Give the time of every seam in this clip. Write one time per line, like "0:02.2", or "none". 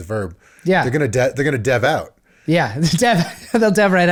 none